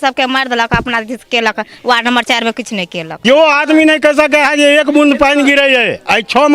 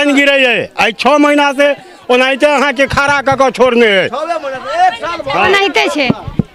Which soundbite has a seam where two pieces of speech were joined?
first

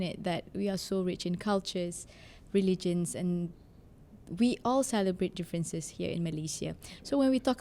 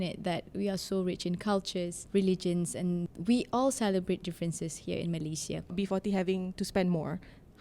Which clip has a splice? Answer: second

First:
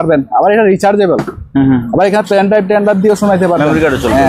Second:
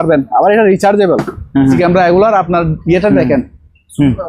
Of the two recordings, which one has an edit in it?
second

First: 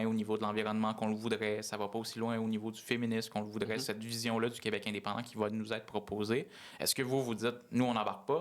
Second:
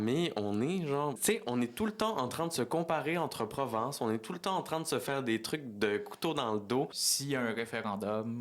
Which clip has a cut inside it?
second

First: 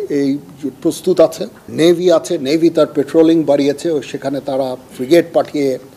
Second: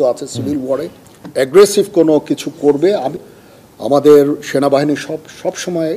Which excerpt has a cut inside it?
second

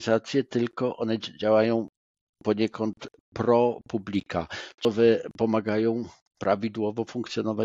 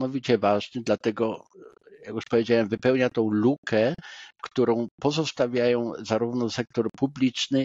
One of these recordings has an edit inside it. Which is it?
first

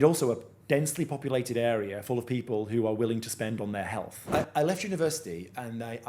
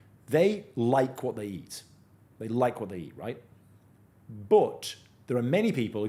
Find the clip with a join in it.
first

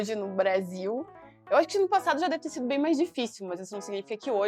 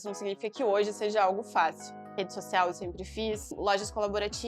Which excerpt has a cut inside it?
second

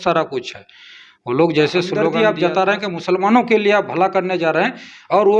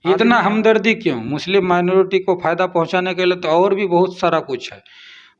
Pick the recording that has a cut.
first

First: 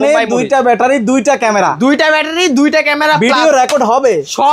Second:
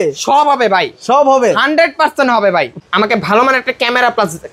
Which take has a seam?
second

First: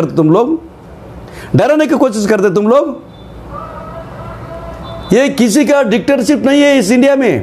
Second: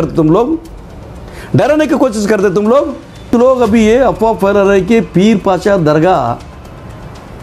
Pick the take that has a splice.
second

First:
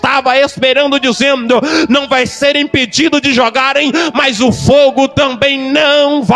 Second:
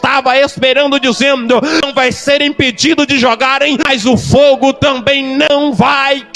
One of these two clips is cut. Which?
second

